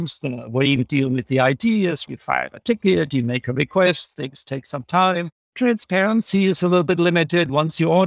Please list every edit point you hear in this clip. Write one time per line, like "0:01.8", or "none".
none